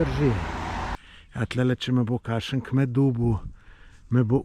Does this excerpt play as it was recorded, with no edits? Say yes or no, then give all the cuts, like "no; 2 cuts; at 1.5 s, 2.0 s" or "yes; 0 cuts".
no; 1 cut; at 0.9 s